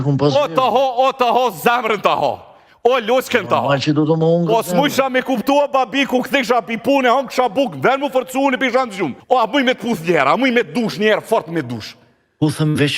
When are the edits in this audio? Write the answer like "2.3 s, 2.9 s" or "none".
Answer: 9.2 s